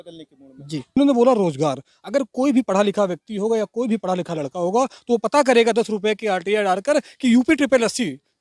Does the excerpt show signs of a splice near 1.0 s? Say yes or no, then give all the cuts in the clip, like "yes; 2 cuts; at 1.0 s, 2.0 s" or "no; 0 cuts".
yes; 1 cut; at 1.0 s